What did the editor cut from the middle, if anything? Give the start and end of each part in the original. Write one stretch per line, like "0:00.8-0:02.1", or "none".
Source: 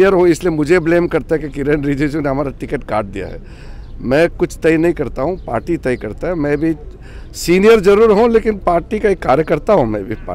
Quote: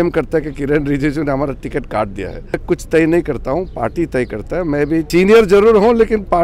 0:03.5-0:04.3
0:06.8-0:07.4